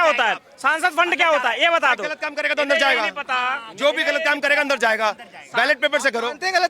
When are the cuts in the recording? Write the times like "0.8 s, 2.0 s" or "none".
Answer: none

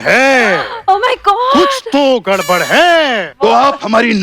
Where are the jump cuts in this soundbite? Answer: 3.3 s

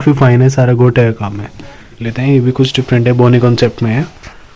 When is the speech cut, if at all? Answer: 2.1 s

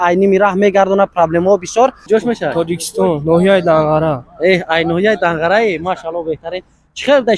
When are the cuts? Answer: 2.0 s

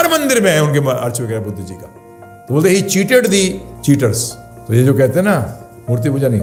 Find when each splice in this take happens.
none

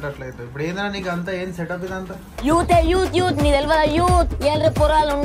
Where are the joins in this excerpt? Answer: none

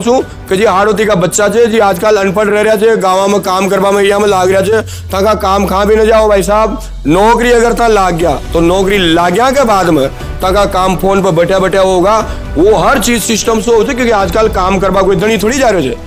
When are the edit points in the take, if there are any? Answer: none

